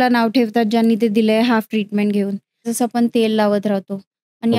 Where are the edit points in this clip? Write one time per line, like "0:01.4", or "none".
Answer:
0:02.7